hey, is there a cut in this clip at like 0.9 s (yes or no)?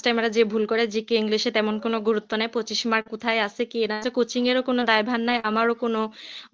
no